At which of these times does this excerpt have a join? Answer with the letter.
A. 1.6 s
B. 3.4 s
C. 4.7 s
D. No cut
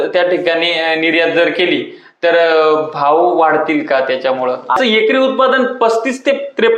C